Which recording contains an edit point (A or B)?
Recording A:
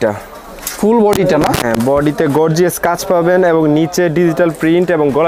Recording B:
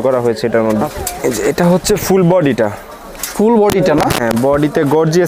B